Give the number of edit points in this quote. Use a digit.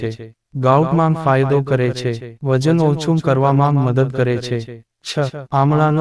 1